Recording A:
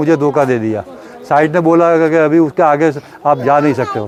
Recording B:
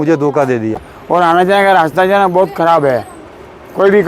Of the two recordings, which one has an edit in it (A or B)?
B